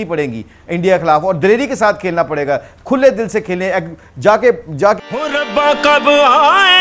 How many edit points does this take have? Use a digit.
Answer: 1